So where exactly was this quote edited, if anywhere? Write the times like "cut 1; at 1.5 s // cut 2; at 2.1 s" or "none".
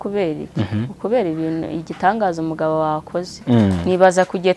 cut 1; at 3.4 s

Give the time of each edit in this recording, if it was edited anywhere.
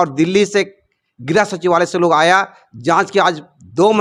none

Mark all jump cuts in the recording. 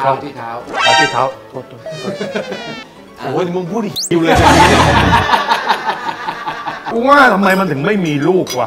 cut 1; at 6.9 s

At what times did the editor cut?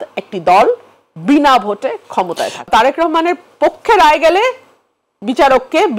cut 1; at 2.7 s

